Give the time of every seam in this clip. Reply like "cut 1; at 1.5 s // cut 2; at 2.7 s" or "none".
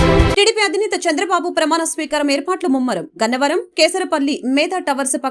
none